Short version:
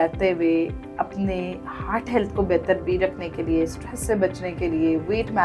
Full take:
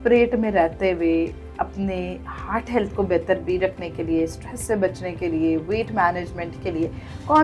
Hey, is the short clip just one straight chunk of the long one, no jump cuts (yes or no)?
yes